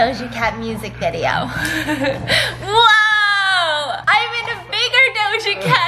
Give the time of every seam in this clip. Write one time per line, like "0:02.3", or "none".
none